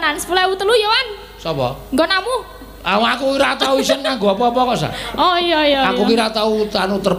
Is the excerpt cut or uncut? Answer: uncut